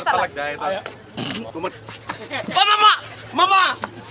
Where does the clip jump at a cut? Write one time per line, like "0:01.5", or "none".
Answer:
0:01.5